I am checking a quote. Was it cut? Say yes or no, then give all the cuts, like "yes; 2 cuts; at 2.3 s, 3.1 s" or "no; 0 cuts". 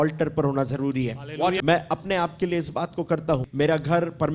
yes; 2 cuts; at 1.6 s, 3.5 s